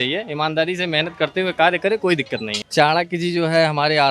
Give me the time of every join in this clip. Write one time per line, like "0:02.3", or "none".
0:02.5